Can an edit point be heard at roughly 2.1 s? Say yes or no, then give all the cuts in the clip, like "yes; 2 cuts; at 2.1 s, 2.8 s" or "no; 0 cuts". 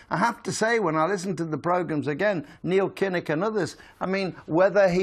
yes; 1 cut; at 2.1 s